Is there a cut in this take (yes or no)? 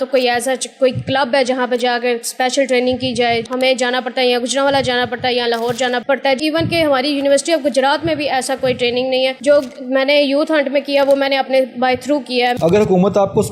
yes